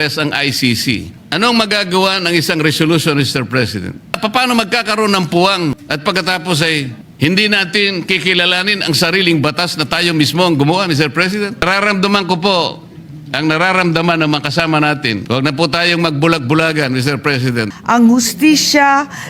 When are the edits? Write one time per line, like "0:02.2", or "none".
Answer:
0:01.2
0:04.2
0:05.9
0:07.0
0:11.6
0:15.2
0:17.7